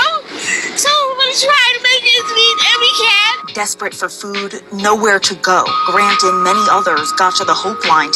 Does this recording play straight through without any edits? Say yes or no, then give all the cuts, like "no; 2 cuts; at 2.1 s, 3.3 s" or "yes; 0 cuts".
yes; 0 cuts